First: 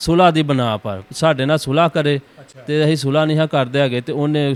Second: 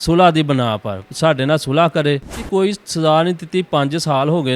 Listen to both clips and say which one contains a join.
second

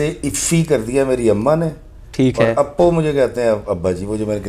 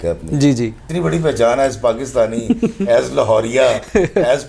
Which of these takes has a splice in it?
second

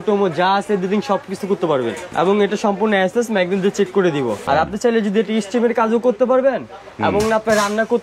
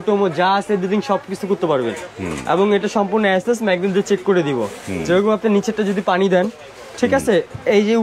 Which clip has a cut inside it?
first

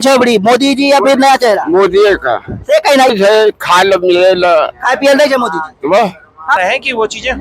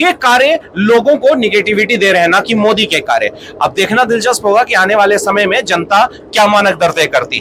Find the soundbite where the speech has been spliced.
first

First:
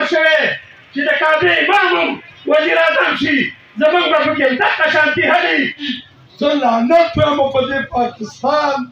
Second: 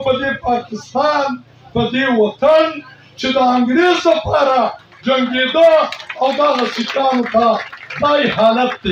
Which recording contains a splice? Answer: first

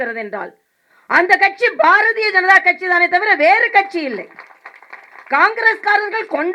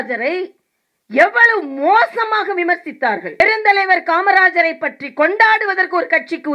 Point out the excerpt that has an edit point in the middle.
second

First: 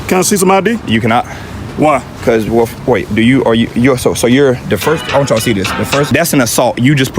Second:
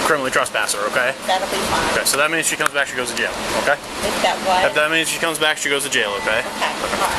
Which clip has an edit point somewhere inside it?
first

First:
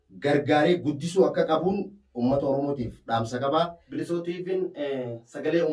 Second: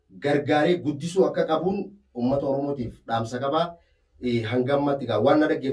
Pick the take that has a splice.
first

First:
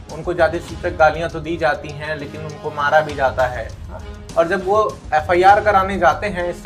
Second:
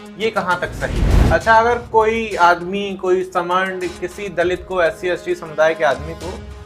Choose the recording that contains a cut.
second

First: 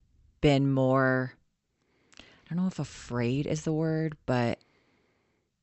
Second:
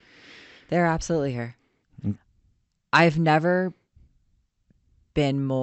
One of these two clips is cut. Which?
second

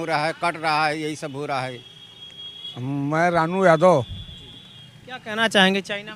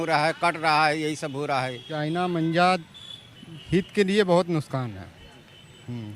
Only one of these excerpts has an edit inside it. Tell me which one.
second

